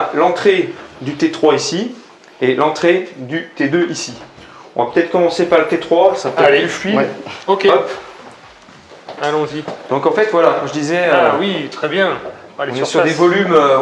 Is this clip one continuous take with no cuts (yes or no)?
yes